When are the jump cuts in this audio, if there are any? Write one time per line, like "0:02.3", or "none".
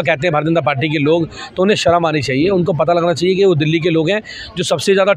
none